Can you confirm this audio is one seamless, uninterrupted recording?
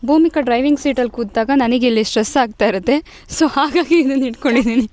yes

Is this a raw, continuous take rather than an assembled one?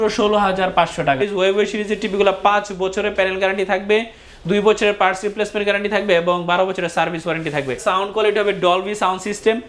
no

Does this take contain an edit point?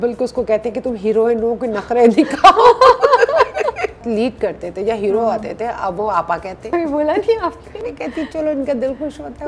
yes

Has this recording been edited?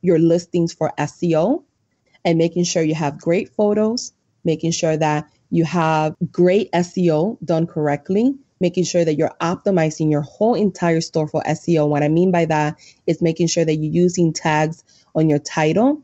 yes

